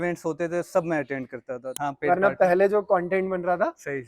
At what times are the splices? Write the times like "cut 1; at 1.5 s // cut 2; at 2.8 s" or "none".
cut 1; at 1.7 s